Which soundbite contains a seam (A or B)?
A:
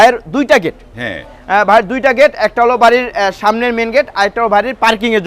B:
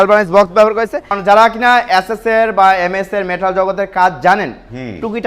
B